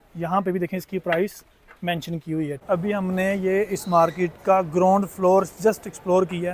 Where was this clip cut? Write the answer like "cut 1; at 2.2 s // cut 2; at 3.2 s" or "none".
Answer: cut 1; at 2.6 s